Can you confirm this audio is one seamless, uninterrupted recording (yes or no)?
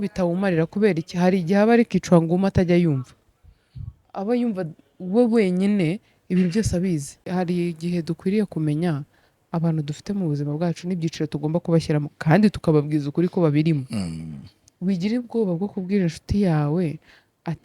no